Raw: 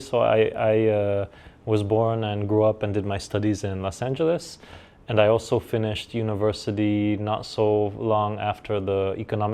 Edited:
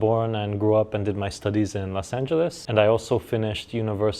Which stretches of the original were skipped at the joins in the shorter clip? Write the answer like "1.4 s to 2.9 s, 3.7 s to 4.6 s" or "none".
4.5 s to 5.0 s